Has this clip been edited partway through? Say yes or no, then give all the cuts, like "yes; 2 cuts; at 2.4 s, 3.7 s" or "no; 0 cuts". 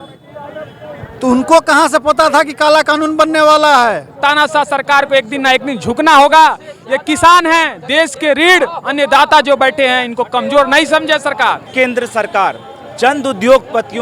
yes; 2 cuts; at 4.2 s, 11.7 s